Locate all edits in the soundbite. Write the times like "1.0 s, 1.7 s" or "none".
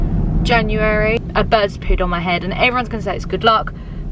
1.2 s